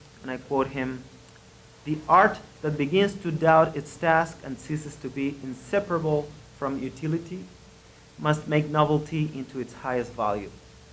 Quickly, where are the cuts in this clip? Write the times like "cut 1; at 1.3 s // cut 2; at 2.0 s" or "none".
cut 1; at 2.9 s